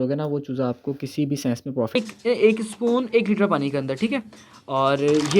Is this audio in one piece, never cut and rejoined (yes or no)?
no